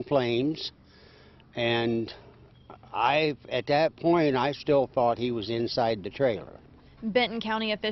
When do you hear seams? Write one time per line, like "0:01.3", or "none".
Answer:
0:05.7